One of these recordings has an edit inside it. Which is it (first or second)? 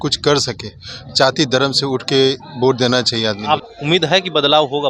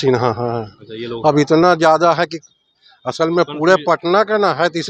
first